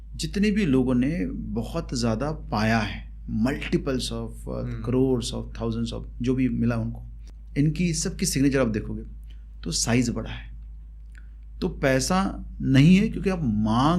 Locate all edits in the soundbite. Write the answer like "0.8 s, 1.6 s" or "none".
none